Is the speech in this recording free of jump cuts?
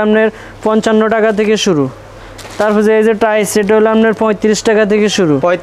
yes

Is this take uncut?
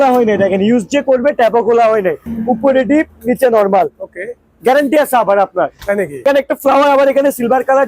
no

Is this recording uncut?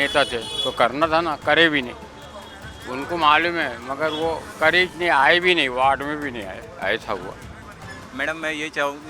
yes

